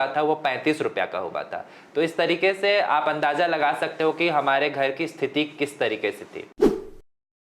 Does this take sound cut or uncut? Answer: uncut